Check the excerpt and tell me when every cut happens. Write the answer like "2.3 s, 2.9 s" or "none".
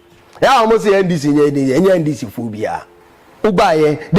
2.9 s